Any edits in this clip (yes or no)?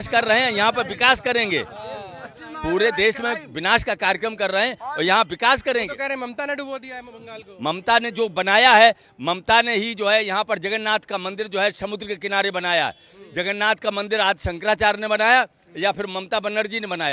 no